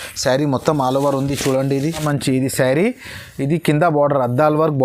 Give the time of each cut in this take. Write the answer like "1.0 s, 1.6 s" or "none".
2.0 s